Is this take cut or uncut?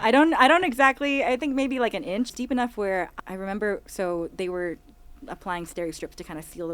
cut